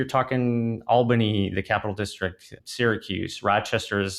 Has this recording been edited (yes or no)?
yes